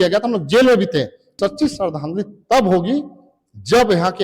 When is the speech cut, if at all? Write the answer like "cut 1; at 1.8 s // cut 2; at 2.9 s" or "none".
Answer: cut 1; at 1.4 s